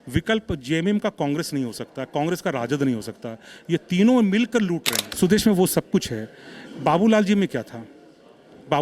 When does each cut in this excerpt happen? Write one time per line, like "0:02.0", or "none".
0:05.0